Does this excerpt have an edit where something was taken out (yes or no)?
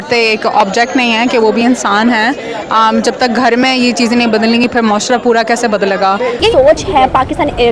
no